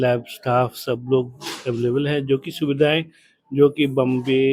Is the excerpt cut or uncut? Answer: uncut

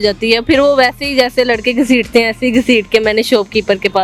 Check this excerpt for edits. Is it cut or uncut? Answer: uncut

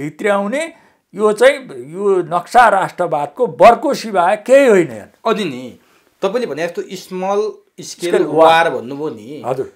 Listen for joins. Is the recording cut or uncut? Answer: uncut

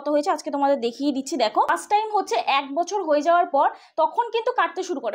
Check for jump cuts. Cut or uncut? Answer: cut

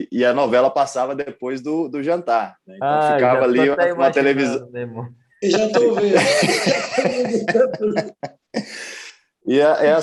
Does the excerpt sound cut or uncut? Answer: uncut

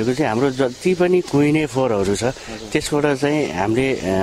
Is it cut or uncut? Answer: uncut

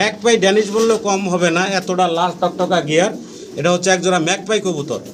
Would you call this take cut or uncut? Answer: uncut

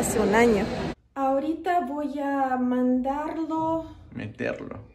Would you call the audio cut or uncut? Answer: cut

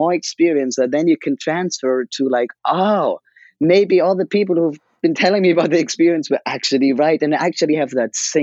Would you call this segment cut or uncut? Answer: uncut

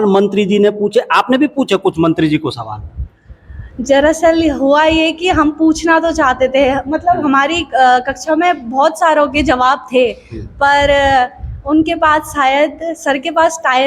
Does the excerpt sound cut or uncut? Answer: uncut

